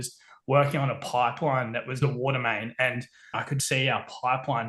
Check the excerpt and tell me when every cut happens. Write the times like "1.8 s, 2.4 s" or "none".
2.0 s, 3.4 s